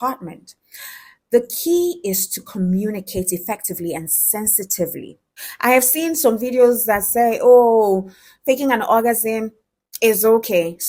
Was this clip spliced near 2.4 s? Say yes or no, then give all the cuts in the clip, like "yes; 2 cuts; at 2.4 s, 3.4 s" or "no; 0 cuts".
no; 1 cut; at 5.4 s